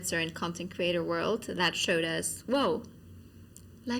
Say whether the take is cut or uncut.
uncut